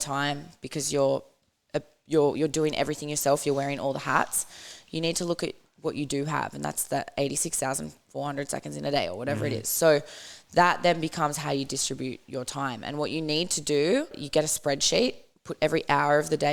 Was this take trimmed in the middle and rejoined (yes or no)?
yes